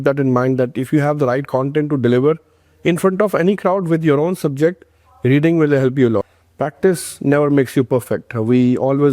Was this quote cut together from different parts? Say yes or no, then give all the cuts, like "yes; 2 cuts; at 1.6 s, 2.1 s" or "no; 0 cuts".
yes; 1 cut; at 6.3 s